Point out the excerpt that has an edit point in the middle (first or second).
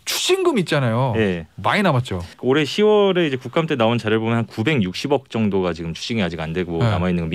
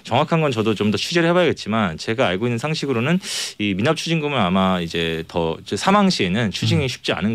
first